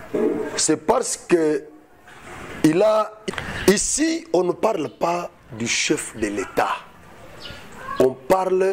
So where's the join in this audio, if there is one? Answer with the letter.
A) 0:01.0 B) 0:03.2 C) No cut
B